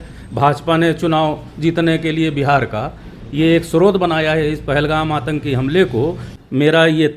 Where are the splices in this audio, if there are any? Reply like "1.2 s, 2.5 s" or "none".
6.3 s